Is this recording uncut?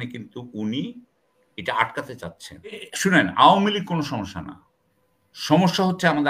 no; 1 cut; at 2.9 s

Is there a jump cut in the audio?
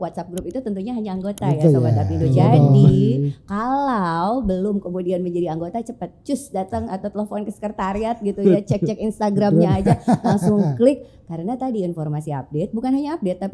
no; 0 cuts

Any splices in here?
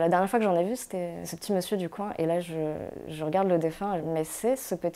yes; 1 cut; at 4.0 s

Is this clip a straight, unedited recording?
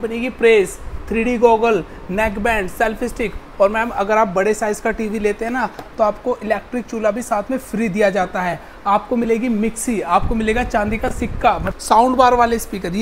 no; 1 cut; at 11.7 s

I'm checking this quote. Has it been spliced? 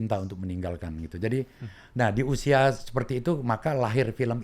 no; 0 cuts

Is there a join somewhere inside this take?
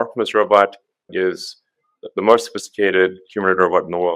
no; 0 cuts

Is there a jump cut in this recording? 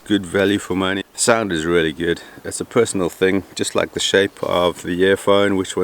yes; 1 cut; at 1.0 s

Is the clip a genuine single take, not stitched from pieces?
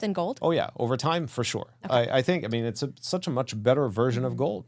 yes; 0 cuts

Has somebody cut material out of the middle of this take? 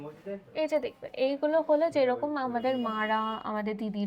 no; 0 cuts

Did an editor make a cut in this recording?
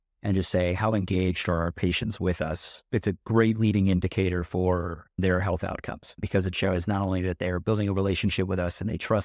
no; 0 cuts

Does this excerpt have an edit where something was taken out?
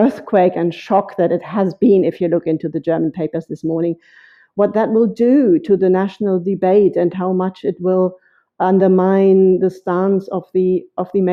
no; 0 cuts

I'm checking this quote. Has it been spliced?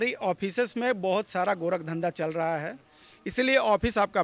no; 0 cuts

